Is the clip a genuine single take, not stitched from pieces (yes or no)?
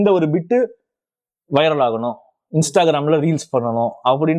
yes